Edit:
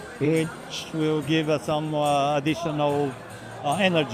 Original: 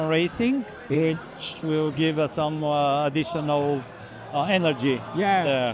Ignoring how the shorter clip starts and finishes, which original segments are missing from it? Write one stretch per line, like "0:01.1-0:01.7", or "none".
none